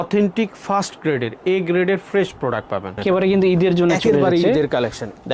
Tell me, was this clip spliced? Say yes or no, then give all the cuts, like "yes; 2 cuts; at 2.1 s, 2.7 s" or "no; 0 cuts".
yes; 1 cut; at 3.0 s